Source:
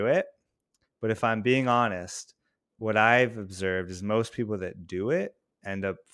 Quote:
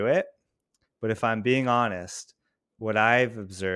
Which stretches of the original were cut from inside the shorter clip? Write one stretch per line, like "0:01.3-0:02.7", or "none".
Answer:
none